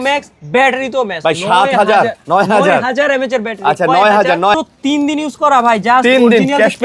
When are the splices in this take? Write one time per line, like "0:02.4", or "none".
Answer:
0:04.5